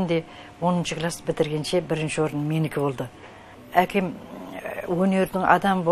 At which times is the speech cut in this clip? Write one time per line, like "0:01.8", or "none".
0:03.6